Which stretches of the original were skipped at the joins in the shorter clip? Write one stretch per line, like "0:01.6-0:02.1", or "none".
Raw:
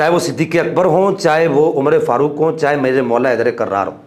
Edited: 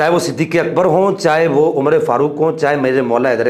none